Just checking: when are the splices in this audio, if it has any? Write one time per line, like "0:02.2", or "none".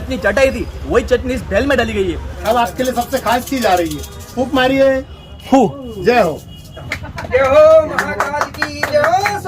0:02.2
0:06.8